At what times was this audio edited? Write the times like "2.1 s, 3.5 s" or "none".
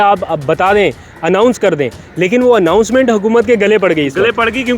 none